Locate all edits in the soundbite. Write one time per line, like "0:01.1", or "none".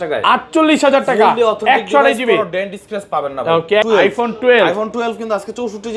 0:03.8